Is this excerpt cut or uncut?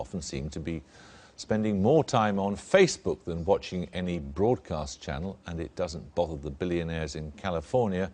cut